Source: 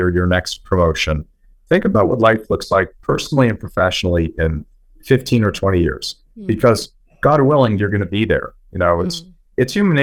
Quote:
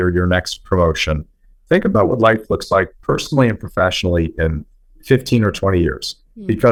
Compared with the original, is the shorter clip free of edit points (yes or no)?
yes